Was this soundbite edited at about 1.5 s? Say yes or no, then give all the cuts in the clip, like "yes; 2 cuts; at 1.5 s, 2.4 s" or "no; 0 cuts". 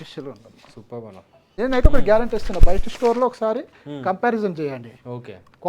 yes; 1 cut; at 1.5 s